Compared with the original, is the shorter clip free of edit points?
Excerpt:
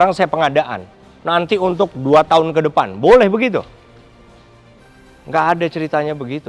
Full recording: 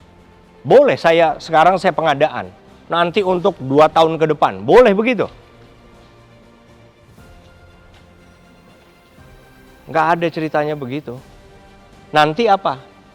no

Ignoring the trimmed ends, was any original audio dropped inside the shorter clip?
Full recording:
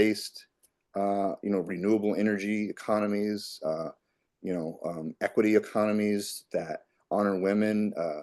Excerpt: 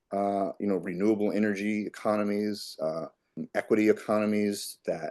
yes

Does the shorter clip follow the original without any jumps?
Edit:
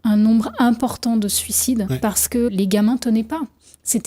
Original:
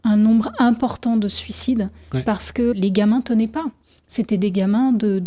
no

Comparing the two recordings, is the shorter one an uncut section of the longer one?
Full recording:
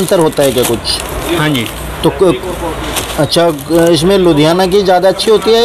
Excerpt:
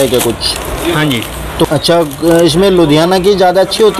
no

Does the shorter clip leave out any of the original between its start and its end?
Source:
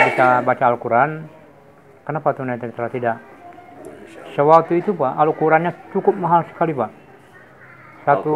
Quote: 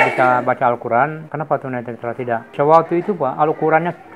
yes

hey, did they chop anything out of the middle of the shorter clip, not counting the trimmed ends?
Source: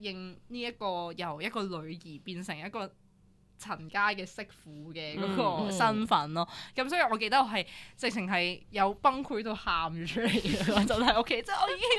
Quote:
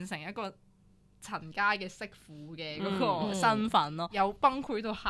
yes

